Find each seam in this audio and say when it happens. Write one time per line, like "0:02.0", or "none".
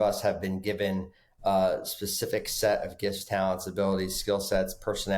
none